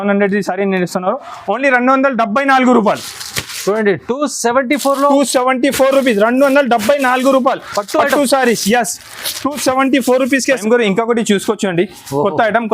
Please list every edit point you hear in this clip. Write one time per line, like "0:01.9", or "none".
0:10.6